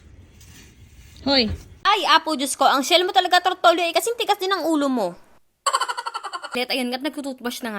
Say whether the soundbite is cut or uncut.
cut